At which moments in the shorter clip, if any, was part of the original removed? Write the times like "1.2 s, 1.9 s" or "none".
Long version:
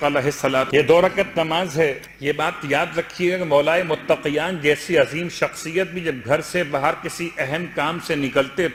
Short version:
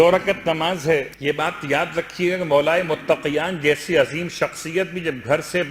1.1 s